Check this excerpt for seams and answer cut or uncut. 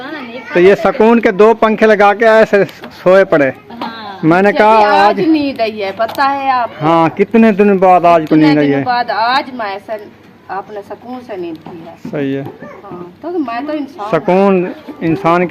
uncut